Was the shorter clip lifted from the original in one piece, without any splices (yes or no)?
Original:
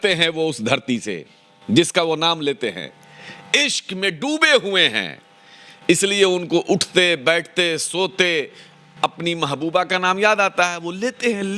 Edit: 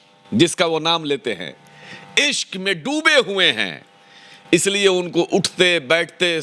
yes